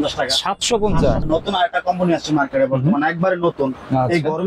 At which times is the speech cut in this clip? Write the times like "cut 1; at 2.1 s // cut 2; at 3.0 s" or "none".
cut 1; at 1.2 s